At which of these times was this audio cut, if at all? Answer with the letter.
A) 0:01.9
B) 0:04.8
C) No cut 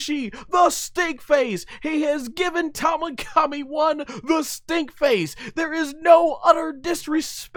C